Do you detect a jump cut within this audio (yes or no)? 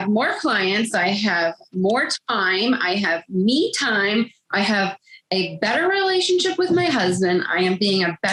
no